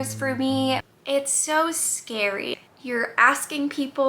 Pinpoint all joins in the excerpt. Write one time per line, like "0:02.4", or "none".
0:00.9
0:02.5